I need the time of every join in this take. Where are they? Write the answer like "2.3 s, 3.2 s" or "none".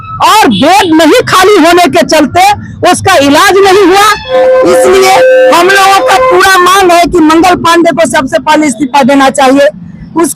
4.3 s